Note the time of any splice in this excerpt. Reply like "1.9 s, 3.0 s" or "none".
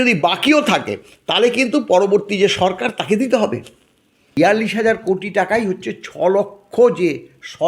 4.3 s